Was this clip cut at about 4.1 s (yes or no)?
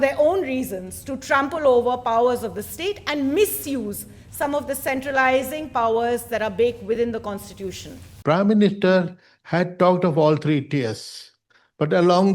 no